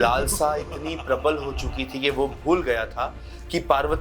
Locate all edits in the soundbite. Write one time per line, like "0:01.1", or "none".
none